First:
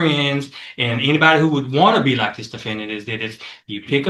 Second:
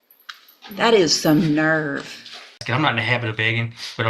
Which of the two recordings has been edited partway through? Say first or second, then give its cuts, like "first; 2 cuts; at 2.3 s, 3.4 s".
second; 1 cut; at 2.6 s